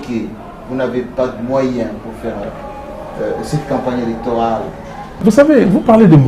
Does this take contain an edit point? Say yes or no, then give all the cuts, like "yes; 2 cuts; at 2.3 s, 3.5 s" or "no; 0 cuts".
yes; 1 cut; at 5.2 s